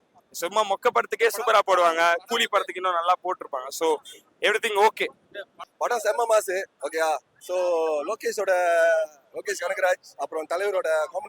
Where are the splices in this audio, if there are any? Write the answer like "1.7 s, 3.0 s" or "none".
5.7 s